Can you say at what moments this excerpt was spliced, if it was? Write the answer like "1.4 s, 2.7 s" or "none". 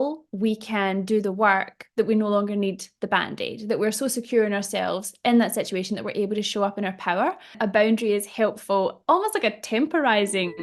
7.6 s